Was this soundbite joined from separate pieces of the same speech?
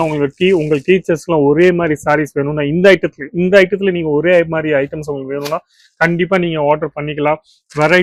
no; 0 cuts

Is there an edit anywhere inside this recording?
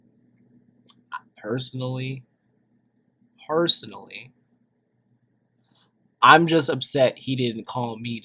no; 0 cuts

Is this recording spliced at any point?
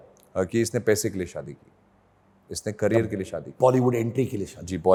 no; 0 cuts

